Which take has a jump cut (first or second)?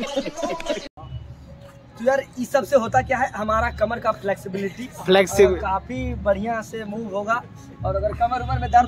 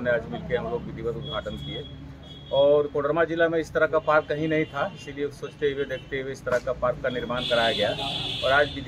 first